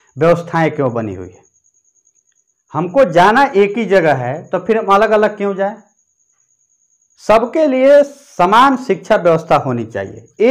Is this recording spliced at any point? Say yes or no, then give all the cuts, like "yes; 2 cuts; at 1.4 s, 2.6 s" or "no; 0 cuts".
no; 0 cuts